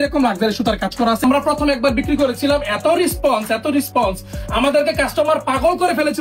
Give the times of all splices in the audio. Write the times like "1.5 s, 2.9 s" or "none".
1.2 s